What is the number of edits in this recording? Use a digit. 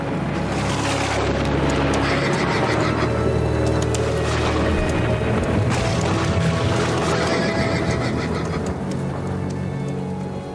1